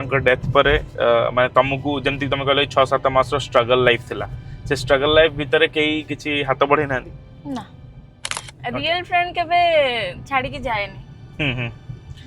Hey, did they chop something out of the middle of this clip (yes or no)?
yes